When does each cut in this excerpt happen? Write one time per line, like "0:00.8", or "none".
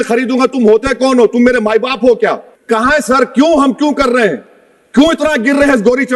0:02.5